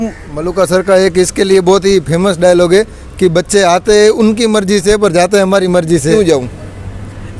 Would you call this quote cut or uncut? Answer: cut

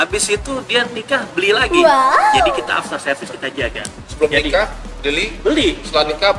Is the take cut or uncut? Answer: cut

